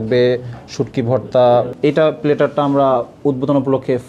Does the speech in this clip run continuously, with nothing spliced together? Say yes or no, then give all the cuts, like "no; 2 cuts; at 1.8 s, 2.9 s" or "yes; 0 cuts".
no; 1 cut; at 1.7 s